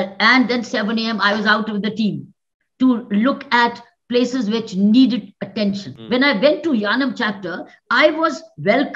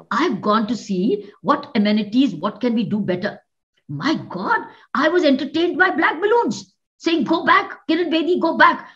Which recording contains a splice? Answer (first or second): first